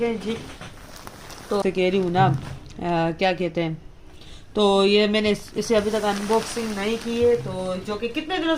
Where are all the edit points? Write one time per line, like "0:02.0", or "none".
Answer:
0:01.6